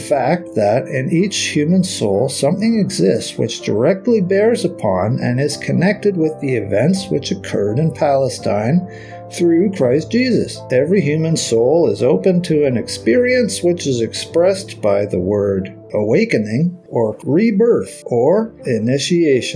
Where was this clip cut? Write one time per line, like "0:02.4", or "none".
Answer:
0:10.7
0:15.8
0:17.1
0:18.0
0:18.6